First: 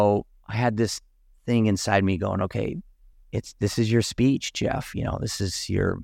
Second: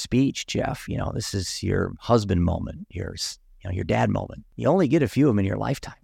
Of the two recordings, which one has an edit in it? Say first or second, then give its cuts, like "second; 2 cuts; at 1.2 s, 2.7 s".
second; 1 cut; at 4.4 s